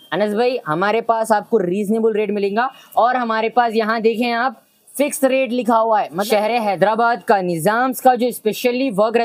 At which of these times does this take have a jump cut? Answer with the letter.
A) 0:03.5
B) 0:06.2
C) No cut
B